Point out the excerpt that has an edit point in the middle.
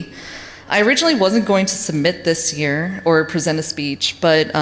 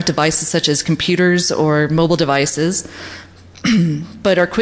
second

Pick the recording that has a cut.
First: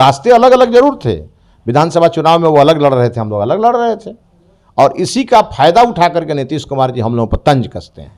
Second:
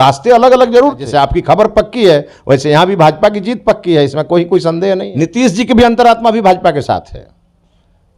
second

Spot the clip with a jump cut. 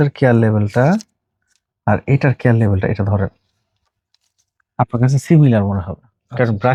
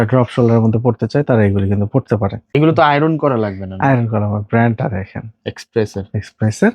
second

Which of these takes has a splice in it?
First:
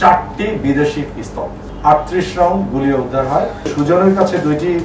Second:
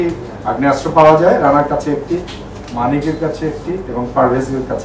first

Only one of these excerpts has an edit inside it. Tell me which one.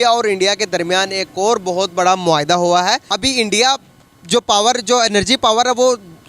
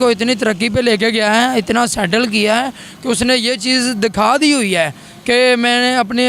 first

